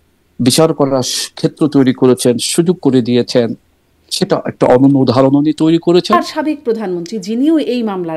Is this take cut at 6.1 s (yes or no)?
yes